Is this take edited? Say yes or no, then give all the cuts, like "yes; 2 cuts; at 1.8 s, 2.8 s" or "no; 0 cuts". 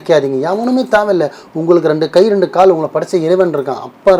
no; 0 cuts